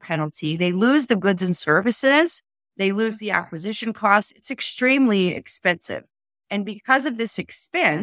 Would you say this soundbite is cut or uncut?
cut